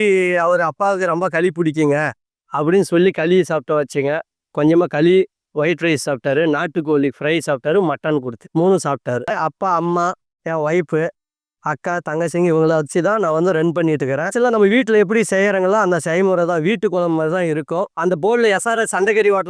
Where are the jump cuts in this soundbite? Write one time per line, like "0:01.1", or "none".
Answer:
0:09.3
0:17.9